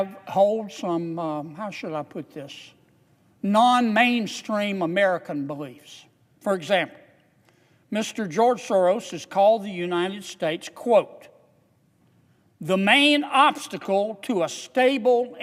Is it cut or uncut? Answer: uncut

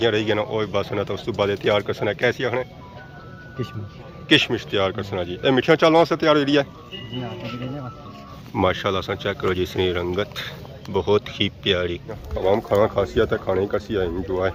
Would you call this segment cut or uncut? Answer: uncut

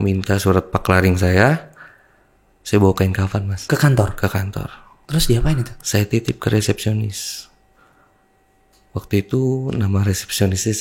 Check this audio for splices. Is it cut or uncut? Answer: uncut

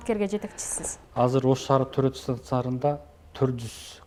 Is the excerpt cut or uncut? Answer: uncut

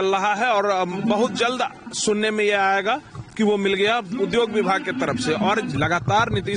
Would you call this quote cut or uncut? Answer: cut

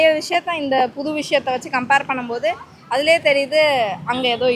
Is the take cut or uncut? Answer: uncut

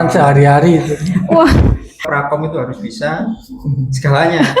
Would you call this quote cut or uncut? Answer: cut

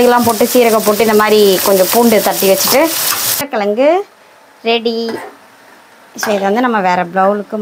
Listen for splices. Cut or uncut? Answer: cut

